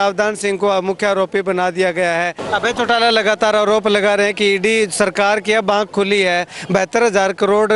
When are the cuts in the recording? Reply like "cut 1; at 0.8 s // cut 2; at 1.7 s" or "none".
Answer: cut 1; at 2.4 s